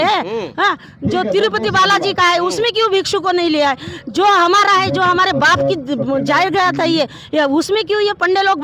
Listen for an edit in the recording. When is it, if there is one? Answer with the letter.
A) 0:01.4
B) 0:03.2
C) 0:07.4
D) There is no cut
D